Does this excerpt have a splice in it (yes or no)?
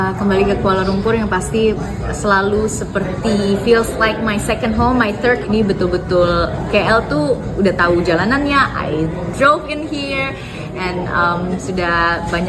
yes